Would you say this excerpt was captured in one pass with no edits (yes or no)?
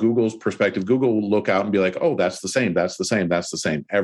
yes